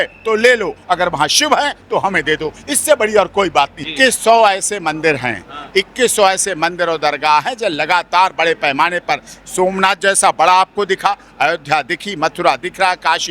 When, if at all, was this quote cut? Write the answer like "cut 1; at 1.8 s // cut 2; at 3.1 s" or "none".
cut 1; at 3.8 s